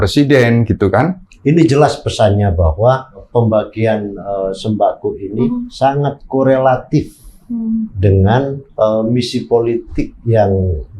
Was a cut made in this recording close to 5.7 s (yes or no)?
yes